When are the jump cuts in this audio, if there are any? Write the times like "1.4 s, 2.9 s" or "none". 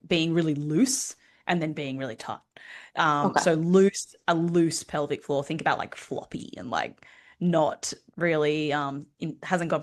none